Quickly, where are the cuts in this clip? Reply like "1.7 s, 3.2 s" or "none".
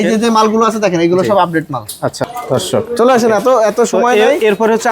2.2 s